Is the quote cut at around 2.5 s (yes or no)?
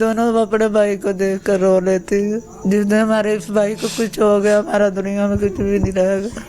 yes